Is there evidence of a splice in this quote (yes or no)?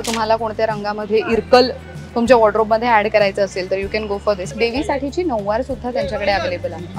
yes